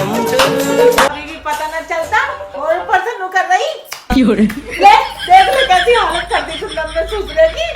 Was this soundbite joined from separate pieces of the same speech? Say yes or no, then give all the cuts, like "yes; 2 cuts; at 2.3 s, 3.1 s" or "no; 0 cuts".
yes; 1 cut; at 1.2 s